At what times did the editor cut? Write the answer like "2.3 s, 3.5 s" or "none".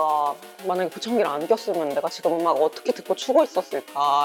none